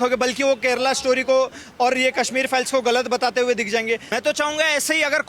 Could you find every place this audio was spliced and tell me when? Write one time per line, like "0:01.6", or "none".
0:04.0